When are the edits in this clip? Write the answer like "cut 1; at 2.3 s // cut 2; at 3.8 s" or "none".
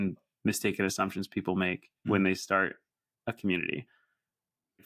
cut 1; at 1.9 s

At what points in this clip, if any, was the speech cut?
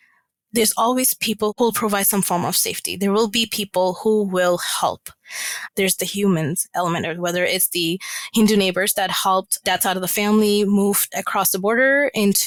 none

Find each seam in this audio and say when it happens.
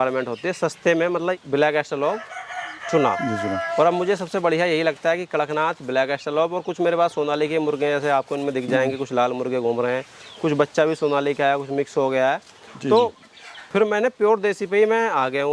cut 1; at 1.4 s

